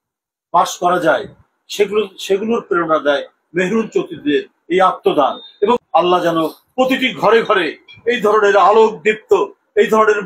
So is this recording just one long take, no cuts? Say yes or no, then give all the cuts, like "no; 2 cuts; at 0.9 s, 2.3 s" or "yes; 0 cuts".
no; 1 cut; at 5.8 s